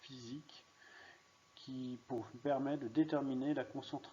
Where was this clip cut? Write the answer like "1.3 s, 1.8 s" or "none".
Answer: none